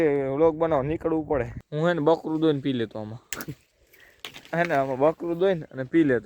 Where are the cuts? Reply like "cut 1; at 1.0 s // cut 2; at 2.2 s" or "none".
cut 1; at 1.6 s